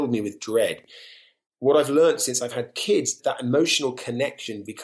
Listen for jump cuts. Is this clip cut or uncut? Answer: cut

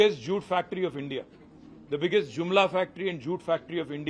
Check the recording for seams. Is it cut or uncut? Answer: uncut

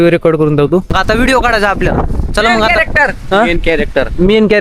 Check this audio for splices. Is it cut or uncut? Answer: cut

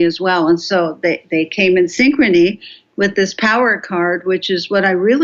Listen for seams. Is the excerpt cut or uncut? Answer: uncut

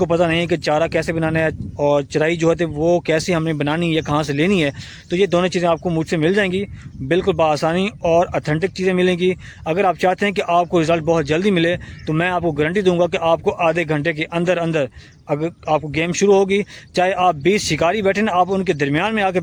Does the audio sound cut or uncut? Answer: uncut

